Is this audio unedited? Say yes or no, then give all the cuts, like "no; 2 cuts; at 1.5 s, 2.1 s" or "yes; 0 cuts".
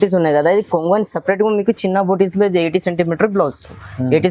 yes; 0 cuts